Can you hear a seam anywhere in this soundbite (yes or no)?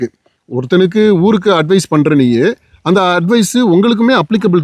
no